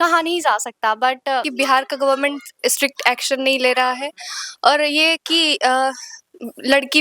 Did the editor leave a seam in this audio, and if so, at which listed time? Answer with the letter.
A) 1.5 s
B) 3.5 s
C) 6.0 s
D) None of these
A